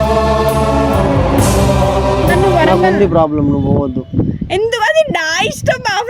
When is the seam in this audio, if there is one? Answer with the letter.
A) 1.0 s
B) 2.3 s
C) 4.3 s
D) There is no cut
B